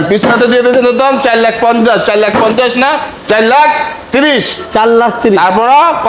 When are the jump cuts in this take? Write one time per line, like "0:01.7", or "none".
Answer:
none